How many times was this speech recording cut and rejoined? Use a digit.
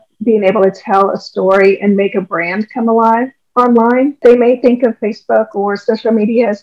1